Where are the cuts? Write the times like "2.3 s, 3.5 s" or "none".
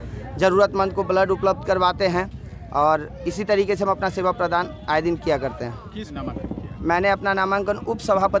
6.1 s